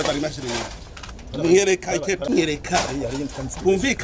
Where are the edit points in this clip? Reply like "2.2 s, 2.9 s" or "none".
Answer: 2.3 s